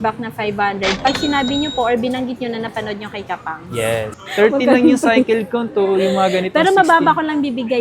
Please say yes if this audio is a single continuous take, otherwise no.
no